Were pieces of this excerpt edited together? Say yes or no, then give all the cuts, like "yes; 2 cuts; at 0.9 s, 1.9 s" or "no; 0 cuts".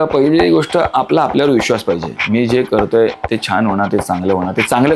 no; 0 cuts